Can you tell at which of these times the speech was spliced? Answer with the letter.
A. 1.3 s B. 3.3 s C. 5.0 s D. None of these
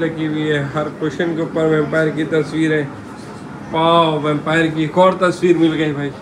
D